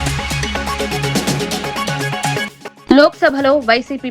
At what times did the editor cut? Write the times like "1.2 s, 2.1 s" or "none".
2.5 s